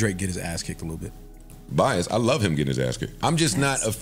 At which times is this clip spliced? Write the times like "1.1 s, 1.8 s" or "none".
3.1 s